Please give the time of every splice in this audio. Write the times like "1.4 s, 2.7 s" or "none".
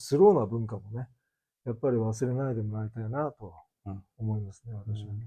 none